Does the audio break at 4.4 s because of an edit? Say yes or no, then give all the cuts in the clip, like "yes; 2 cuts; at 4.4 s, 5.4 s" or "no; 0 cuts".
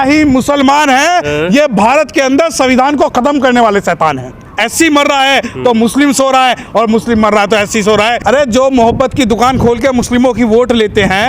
yes; 2 cuts; at 4.4 s, 8.2 s